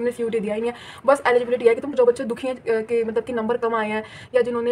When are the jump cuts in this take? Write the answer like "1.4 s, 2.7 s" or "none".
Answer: 1.9 s